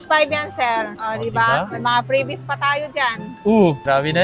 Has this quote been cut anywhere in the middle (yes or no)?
no